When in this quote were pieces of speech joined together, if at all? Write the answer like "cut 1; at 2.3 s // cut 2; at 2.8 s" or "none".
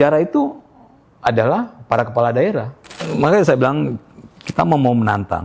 cut 1; at 3.1 s